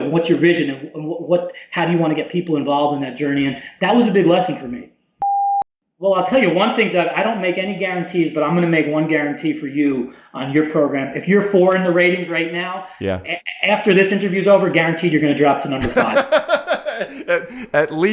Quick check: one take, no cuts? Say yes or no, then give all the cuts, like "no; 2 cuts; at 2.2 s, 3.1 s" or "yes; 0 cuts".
no; 2 cuts; at 5.4 s, 16.0 s